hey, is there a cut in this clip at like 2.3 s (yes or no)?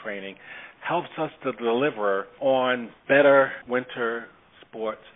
yes